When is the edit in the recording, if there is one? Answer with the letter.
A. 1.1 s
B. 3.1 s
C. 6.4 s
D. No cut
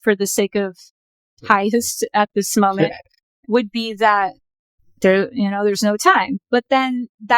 C